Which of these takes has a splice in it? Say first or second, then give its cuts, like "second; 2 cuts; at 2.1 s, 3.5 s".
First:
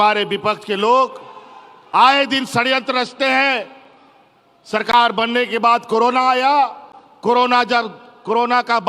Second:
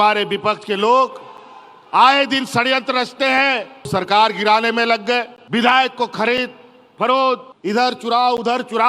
second; 3 cuts; at 3.9 s, 5.4 s, 7.5 s